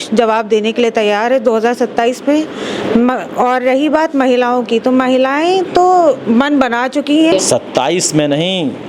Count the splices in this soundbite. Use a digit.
1